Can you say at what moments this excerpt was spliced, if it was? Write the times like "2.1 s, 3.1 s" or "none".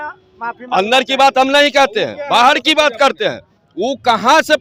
none